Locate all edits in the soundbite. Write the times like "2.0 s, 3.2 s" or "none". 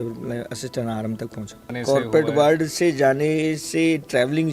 1.7 s